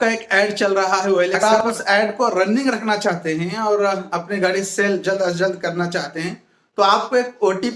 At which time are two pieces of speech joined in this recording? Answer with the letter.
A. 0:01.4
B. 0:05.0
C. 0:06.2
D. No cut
A